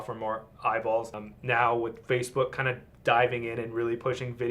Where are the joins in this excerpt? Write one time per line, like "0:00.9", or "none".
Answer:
0:01.3

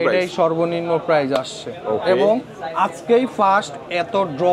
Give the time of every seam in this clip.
none

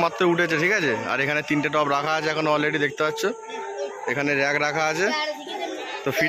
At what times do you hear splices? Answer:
none

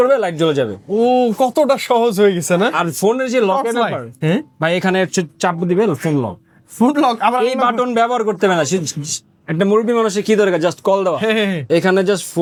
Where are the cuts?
none

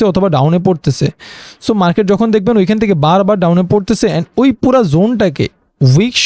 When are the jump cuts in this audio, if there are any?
none

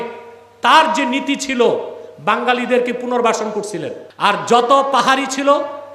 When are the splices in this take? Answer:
0:04.0

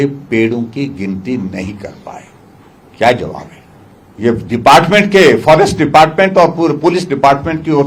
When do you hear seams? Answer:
none

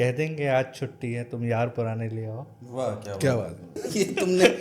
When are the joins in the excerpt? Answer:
0:03.7

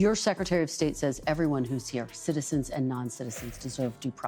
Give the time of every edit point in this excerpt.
none

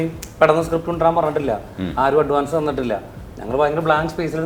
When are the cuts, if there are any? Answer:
none

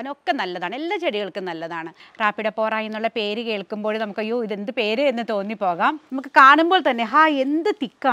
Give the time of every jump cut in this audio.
0:02.0
0:06.1

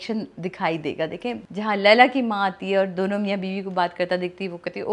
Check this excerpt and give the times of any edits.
0:01.4

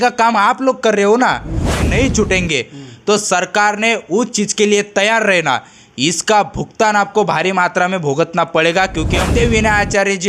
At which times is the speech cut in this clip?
0:01.9
0:09.2

